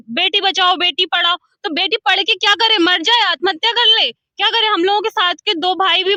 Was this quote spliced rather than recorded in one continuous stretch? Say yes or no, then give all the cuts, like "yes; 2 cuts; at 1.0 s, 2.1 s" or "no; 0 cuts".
no; 0 cuts